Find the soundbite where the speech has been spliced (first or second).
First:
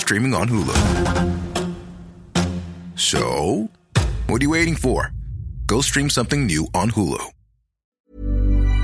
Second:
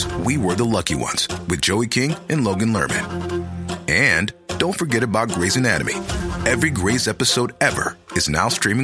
first